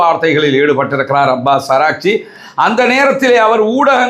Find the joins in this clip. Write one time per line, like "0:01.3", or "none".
none